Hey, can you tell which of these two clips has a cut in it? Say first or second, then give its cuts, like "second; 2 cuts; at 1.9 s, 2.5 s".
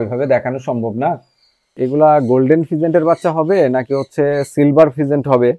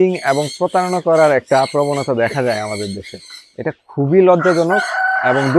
first; 1 cut; at 1.7 s